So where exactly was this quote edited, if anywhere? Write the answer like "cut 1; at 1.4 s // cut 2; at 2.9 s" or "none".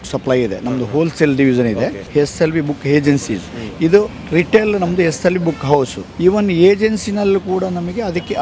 cut 1; at 2.0 s // cut 2; at 6.0 s